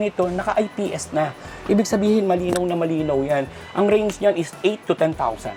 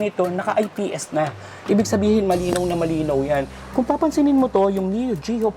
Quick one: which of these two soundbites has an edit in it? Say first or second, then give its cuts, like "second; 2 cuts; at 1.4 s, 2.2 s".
second; 1 cut; at 3.6 s